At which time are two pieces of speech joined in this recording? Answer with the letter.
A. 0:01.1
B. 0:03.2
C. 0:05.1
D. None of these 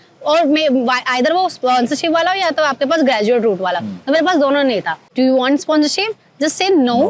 C